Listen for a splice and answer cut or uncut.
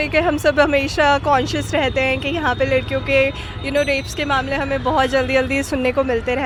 uncut